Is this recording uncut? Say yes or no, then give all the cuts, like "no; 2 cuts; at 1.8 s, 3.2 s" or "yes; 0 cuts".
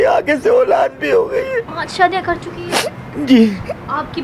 yes; 0 cuts